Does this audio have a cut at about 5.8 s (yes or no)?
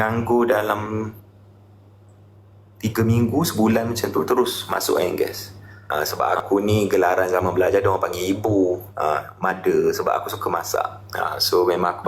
yes